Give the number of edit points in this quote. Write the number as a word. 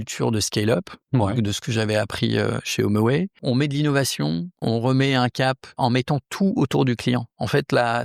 three